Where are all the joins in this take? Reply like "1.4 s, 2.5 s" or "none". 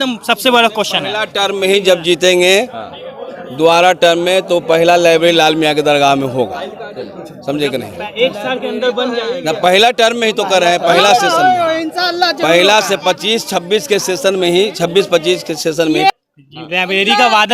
16.1 s